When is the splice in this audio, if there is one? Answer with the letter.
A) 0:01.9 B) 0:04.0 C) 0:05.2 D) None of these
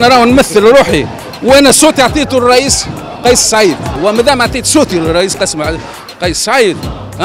B